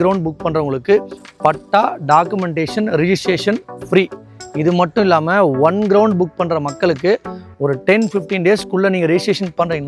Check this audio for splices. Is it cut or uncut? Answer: cut